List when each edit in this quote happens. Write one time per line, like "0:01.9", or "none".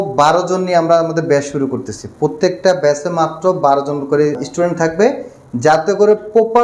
0:04.4